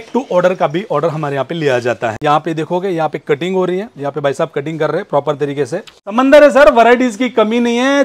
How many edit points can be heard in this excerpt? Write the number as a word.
two